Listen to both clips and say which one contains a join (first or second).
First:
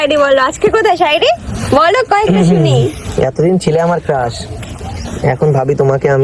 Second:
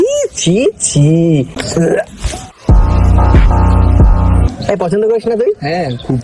second